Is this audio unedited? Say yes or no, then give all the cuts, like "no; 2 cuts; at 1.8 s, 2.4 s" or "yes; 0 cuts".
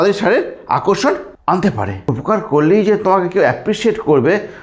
no; 2 cuts; at 1.3 s, 2.1 s